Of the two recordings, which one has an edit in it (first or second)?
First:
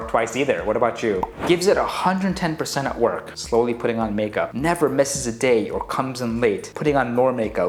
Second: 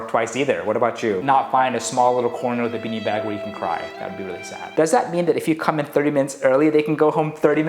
second